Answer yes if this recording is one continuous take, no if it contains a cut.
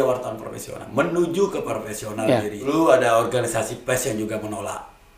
no